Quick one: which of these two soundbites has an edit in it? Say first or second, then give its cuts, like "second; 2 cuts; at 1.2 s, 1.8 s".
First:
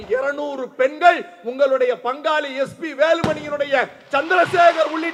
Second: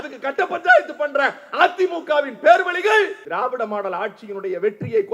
second; 1 cut; at 3.2 s